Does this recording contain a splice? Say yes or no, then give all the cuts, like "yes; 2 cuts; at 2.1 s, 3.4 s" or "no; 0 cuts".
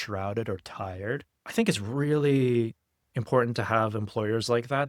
yes; 1 cut; at 1.4 s